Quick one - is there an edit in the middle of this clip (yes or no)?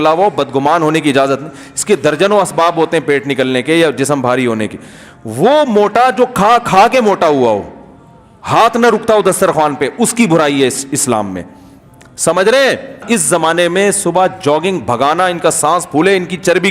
yes